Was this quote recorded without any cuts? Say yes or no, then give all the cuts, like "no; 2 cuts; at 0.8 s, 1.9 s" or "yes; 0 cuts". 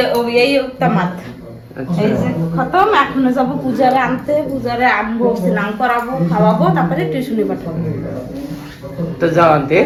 yes; 0 cuts